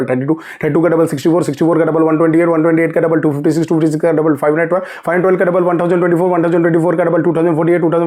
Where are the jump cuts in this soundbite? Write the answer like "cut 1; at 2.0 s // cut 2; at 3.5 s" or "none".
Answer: none